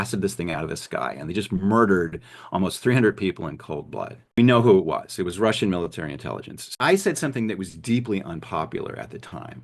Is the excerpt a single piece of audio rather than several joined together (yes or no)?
no